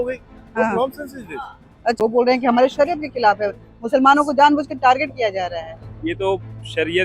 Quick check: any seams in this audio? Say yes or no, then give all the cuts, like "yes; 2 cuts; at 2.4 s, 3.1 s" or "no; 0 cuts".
yes; 1 cut; at 2.0 s